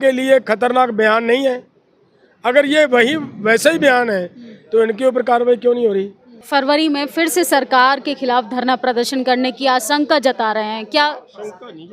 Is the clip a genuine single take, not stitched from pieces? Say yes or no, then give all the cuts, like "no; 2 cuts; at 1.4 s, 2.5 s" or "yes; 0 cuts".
no; 1 cut; at 6.3 s